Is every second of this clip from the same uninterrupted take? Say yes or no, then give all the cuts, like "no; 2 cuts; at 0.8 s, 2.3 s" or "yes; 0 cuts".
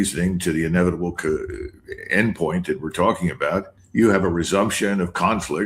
no; 1 cut; at 3.8 s